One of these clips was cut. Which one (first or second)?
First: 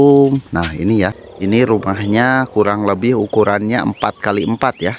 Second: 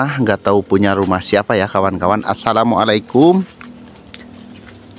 first